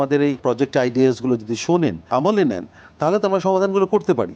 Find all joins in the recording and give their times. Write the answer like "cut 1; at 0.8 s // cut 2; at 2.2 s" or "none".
cut 1; at 2.0 s